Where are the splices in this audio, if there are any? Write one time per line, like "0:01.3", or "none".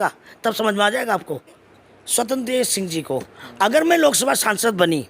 0:01.6